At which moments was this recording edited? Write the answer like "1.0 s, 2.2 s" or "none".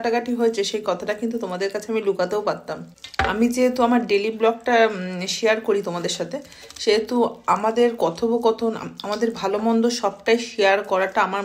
3.3 s